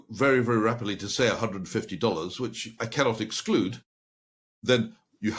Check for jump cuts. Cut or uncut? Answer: uncut